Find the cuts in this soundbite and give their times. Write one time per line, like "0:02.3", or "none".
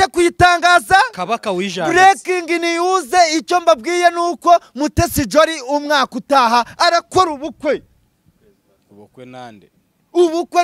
none